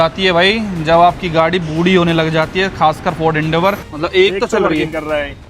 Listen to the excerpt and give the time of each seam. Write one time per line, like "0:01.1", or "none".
0:03.9